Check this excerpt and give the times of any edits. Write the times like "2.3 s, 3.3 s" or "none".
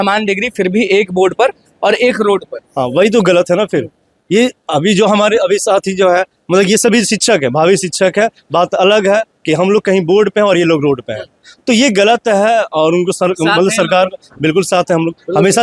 none